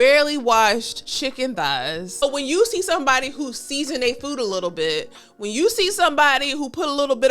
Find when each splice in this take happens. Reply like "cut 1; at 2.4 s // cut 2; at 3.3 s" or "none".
cut 1; at 1.0 s // cut 2; at 2.2 s